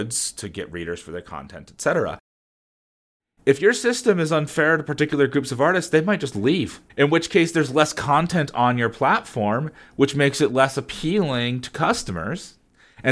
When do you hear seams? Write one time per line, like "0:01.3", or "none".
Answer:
0:02.8